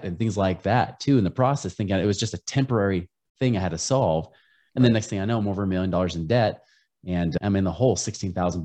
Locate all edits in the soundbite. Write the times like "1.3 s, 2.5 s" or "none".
7.4 s